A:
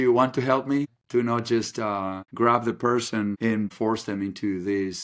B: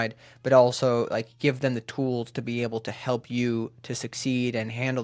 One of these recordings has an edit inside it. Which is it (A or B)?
A